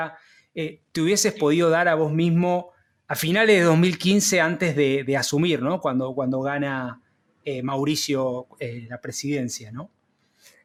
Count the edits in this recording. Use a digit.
0